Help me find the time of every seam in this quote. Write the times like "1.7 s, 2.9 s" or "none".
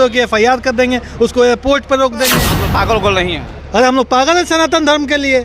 2.6 s